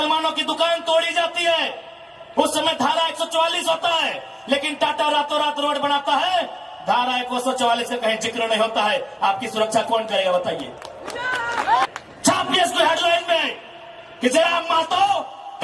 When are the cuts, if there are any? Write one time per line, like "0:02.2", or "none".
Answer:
0:11.9